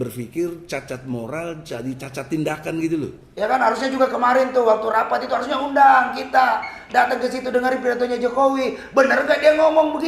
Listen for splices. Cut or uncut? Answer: cut